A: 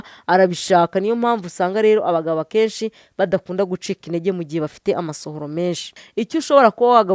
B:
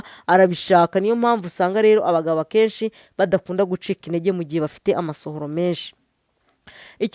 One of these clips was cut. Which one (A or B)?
A